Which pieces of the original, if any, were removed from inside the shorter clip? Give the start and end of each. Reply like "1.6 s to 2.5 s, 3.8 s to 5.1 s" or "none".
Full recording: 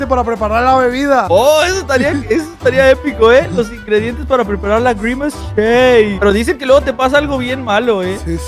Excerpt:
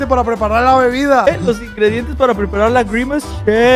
1.3 s to 3.4 s